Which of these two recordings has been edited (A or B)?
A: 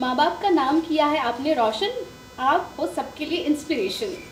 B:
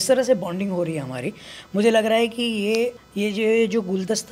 B